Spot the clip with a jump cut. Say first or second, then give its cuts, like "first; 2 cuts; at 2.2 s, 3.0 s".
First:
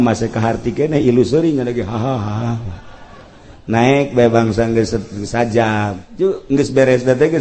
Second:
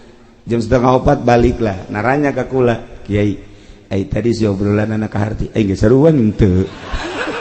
first; 1 cut; at 6.0 s